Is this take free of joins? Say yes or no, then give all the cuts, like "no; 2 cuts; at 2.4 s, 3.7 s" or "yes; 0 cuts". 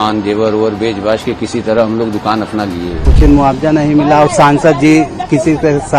no; 1 cut; at 3.1 s